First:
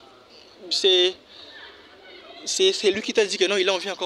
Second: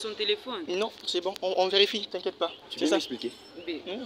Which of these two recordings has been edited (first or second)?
second